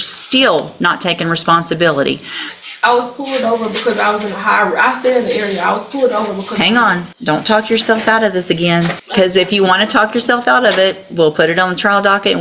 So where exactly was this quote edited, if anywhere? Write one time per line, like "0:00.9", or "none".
0:02.5
0:07.1
0:09.0